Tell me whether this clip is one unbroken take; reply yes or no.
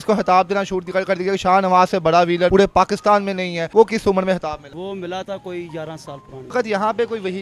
no